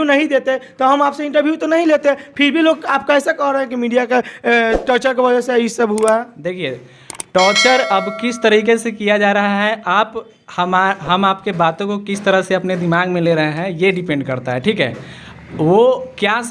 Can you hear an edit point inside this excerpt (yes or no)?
no